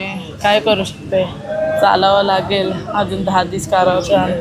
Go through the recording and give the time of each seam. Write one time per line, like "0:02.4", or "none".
none